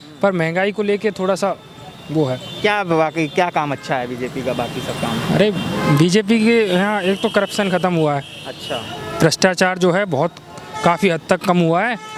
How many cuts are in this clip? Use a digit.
0